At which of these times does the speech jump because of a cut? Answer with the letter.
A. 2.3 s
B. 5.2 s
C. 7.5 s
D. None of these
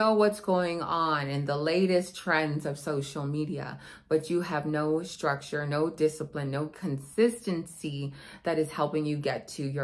D